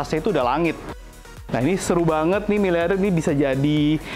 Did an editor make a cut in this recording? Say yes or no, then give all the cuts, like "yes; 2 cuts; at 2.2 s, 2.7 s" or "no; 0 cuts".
yes; 1 cut; at 1.3 s